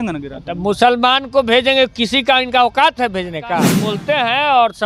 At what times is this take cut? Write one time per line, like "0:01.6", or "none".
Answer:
0:03.9